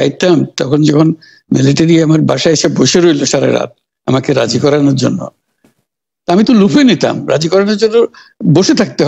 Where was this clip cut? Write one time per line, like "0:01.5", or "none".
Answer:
none